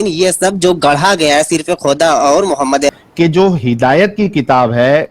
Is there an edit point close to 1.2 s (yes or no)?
no